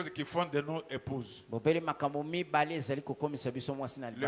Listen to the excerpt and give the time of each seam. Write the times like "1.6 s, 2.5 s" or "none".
none